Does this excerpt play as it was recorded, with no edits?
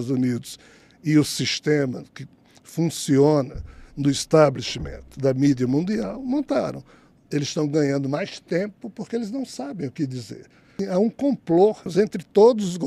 no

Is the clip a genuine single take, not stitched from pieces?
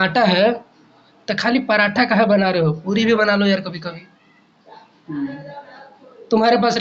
yes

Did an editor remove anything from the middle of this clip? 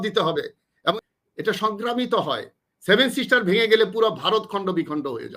yes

